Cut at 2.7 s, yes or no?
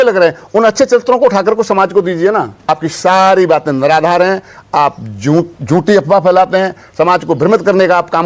yes